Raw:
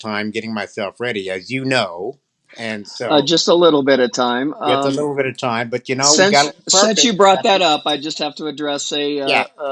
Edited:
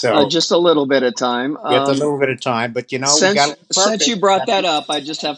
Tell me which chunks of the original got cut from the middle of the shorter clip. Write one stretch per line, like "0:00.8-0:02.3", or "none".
none